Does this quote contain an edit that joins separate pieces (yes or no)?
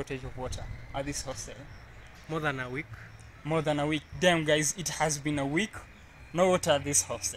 no